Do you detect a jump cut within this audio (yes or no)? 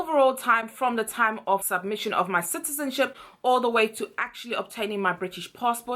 no